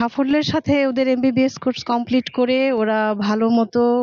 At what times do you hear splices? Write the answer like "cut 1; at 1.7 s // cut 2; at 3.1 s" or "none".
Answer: none